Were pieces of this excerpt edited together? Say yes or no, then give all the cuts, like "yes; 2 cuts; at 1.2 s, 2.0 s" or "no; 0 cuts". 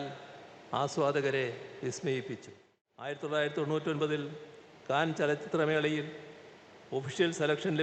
yes; 1 cut; at 3.1 s